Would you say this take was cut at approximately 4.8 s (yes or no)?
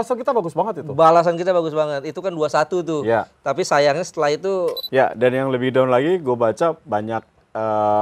yes